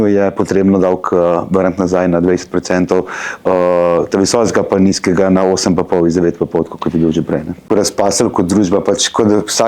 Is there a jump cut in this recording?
yes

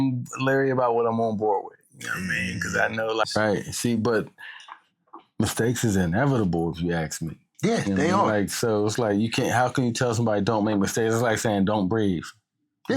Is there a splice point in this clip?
yes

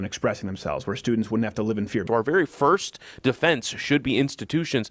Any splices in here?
yes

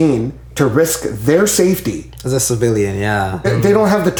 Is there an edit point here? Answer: no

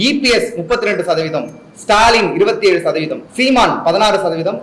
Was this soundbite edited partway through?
yes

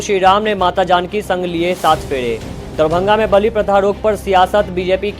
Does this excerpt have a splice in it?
yes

